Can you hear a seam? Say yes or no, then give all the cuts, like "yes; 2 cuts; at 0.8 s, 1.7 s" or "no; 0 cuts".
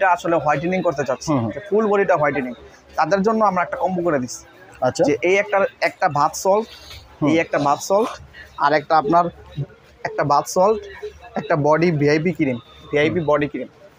no; 0 cuts